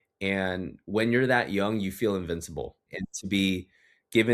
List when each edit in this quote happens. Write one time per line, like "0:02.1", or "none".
0:02.9